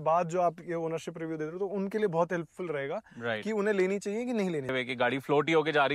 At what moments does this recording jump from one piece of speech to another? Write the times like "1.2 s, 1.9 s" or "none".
4.7 s